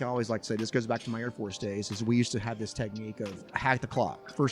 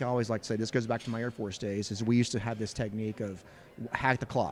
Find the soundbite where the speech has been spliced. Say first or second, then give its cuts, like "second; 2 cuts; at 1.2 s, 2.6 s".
first; 1 cut; at 3.5 s